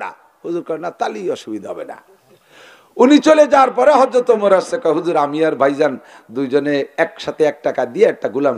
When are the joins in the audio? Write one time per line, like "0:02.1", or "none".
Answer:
none

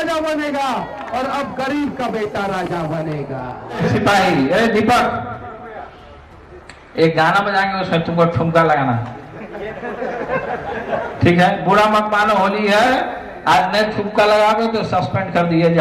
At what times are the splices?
0:03.8

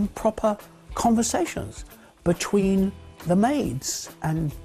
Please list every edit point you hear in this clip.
0:03.1

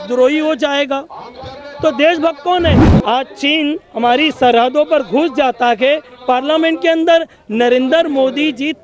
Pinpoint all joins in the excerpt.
0:02.9

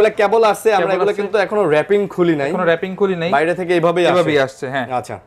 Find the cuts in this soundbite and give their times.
none

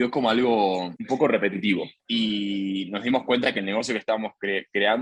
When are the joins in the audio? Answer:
0:00.9
0:02.0

